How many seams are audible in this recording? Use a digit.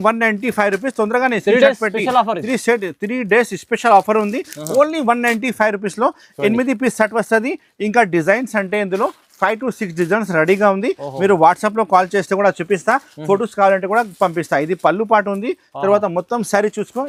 0